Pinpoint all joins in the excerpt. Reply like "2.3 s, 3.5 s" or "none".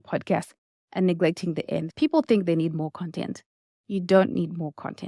1.9 s